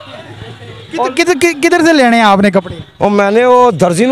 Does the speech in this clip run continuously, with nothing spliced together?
yes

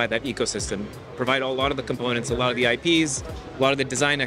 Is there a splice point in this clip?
no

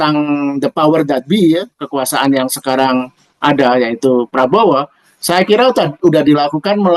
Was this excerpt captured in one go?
yes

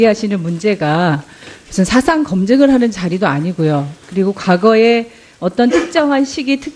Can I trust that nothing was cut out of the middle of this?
yes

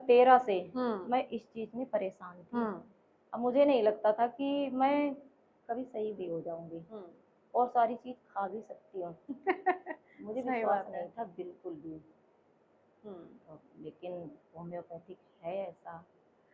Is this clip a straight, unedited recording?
yes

